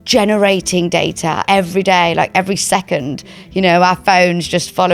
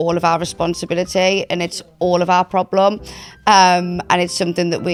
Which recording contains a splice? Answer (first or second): first